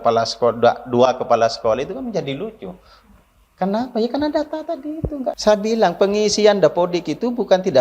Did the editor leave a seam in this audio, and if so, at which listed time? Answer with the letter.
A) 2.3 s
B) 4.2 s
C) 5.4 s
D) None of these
C